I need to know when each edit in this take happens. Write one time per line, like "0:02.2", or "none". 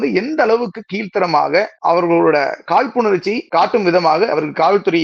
0:01.7
0:03.4
0:04.3